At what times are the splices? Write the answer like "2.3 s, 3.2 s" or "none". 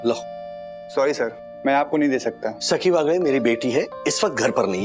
2.6 s